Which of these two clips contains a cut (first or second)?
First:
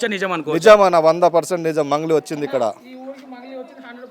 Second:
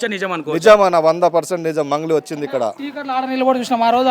second